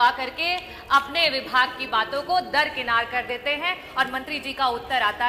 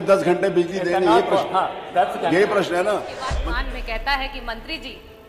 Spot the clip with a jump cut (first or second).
second